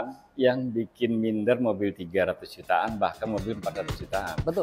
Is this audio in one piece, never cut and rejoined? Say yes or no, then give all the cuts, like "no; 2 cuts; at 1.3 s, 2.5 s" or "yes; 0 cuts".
yes; 0 cuts